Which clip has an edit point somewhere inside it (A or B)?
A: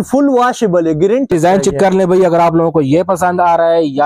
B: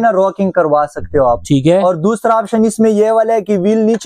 A